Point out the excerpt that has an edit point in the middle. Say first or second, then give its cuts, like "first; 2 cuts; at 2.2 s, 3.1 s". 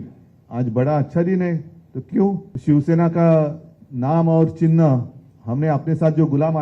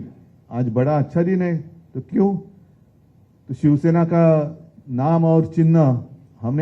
first; 1 cut; at 2.5 s